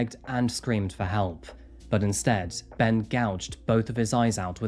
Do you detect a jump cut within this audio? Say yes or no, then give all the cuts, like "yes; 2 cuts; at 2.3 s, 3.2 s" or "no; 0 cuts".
no; 0 cuts